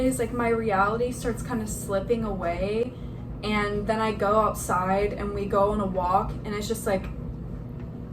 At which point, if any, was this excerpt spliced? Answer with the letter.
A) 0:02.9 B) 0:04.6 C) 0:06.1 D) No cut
D